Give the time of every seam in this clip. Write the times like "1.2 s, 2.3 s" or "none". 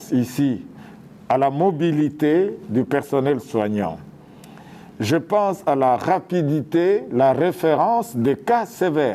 none